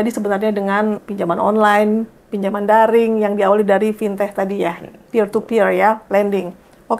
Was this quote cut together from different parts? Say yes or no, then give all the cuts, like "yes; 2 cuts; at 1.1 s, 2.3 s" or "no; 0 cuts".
yes; 1 cut; at 1.0 s